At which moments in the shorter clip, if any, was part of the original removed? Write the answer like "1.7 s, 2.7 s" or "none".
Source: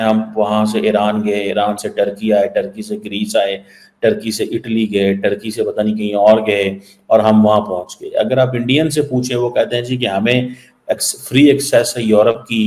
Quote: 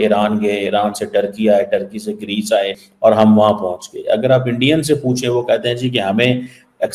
2.8 s